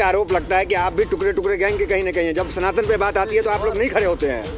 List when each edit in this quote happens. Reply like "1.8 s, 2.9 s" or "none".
none